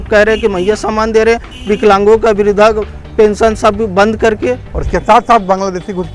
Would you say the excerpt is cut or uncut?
cut